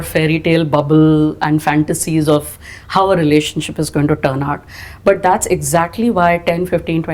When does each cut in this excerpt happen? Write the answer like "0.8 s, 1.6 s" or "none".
none